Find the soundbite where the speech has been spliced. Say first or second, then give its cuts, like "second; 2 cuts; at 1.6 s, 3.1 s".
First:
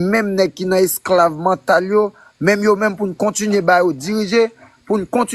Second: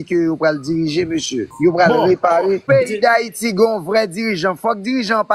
second; 2 cuts; at 1.5 s, 2.6 s